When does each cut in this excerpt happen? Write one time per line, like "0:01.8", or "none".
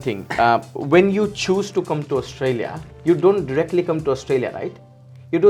none

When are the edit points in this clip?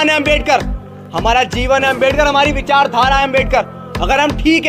none

